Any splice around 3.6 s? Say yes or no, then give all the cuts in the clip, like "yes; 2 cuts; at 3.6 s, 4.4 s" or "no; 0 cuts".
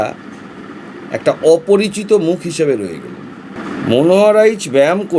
yes; 1 cut; at 3.6 s